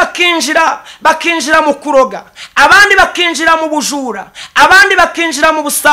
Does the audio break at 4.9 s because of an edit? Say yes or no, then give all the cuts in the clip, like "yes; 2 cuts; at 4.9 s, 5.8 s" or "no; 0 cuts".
no; 0 cuts